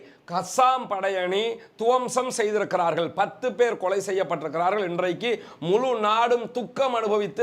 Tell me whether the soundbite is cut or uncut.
uncut